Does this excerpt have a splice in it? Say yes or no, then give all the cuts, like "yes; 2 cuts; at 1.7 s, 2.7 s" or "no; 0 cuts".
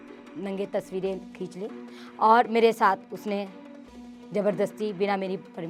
no; 0 cuts